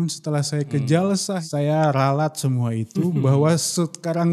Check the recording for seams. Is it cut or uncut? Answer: cut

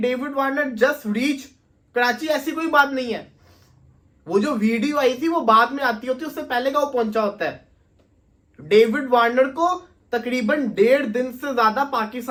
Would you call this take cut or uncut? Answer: uncut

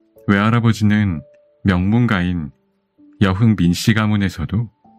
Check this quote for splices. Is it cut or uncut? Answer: uncut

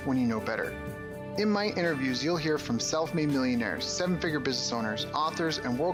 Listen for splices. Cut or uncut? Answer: uncut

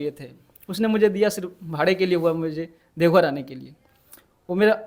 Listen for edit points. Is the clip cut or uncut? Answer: uncut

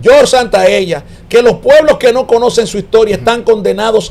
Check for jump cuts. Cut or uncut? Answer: uncut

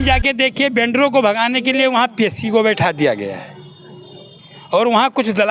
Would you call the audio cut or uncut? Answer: uncut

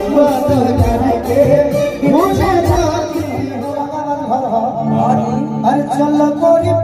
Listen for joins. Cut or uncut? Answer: cut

